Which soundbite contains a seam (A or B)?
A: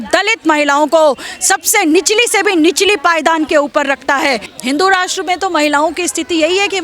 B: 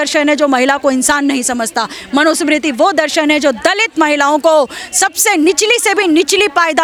A